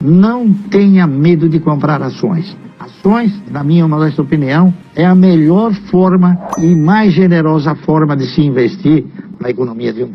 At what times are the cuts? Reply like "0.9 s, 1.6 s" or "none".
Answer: 3.5 s, 9.2 s